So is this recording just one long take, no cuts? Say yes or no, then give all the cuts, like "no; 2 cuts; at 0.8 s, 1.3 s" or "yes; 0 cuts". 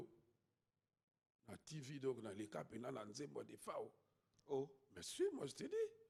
yes; 0 cuts